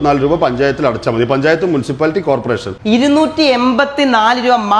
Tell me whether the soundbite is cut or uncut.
uncut